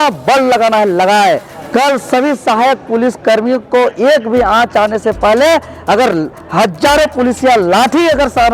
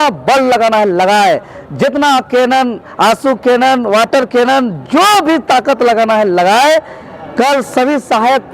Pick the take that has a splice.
first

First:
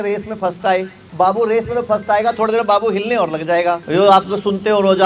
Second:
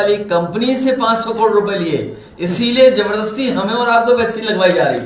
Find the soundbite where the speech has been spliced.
first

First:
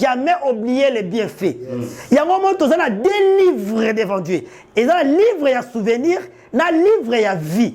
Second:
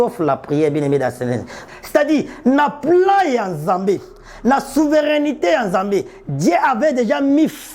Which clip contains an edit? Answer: second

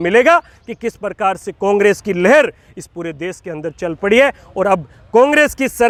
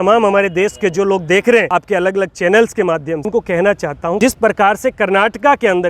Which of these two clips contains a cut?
second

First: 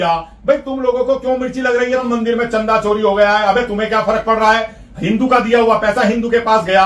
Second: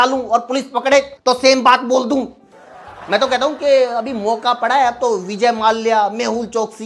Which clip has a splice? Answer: first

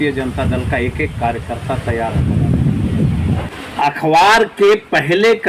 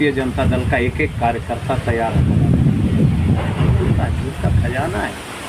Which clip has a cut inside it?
first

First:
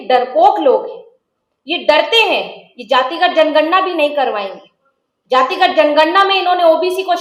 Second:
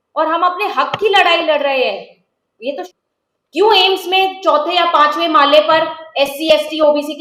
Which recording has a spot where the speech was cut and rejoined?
second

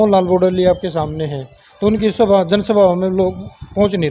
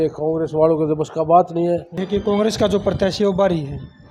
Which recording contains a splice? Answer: second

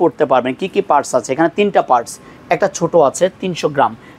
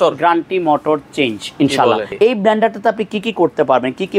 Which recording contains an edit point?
second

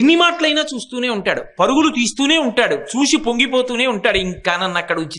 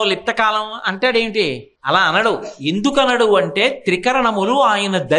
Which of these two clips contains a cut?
second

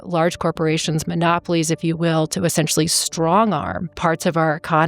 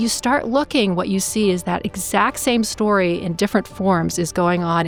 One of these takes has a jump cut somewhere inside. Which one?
first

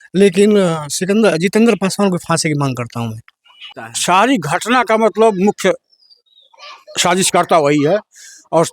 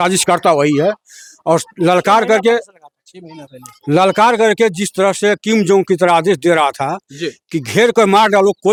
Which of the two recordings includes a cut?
first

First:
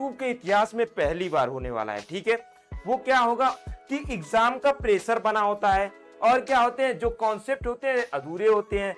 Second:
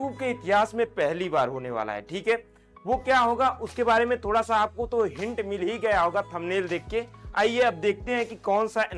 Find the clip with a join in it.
first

